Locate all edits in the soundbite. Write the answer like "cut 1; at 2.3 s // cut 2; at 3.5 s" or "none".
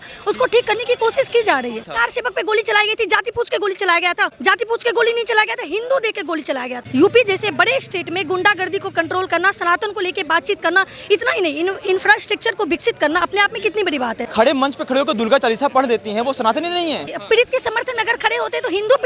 cut 1; at 2.0 s // cut 2; at 4.3 s // cut 3; at 6.7 s // cut 4; at 14.2 s // cut 5; at 17.1 s